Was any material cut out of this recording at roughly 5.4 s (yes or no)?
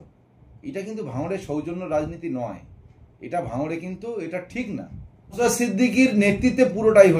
yes